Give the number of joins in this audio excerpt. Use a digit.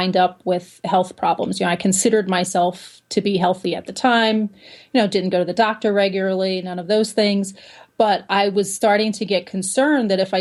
0